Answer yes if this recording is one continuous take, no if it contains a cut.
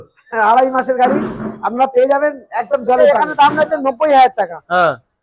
no